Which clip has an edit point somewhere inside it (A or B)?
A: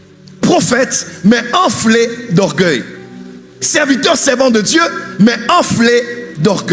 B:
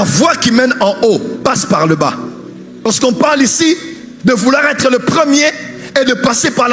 B